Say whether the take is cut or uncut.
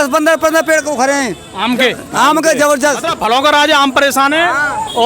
cut